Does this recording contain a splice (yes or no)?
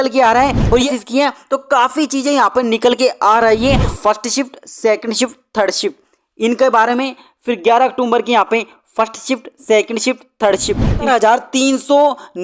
yes